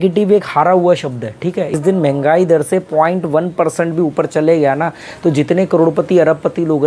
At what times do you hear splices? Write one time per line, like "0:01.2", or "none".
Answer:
0:01.8